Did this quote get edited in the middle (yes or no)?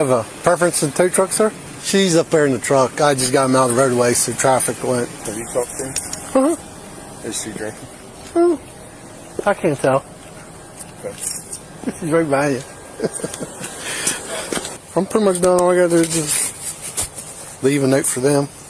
no